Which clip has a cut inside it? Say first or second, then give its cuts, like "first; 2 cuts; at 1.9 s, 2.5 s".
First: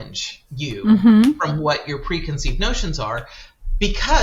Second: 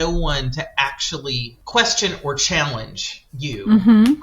second; 1 cut; at 1.5 s